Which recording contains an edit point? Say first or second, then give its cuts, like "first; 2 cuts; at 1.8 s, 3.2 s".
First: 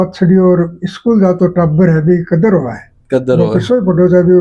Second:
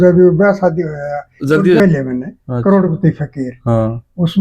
second; 1 cut; at 1.8 s